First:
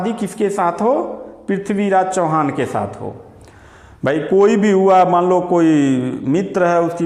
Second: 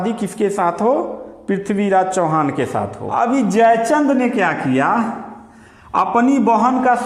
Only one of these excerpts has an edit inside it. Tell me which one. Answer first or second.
second